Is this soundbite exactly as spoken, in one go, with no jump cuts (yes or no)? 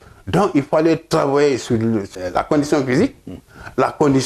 no